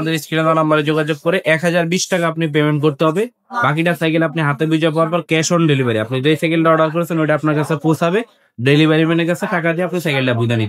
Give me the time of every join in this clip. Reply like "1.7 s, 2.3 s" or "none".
none